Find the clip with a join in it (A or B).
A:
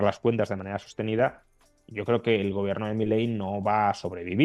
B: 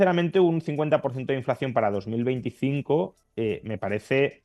B